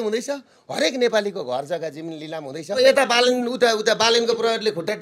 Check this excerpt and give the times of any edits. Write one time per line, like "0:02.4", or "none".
0:02.8